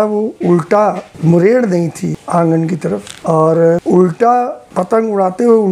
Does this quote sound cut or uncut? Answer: cut